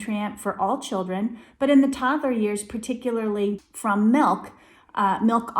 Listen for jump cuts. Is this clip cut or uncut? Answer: cut